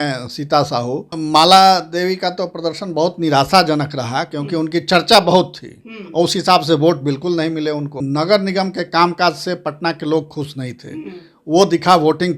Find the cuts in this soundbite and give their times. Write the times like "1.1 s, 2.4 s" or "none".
1.1 s, 8.0 s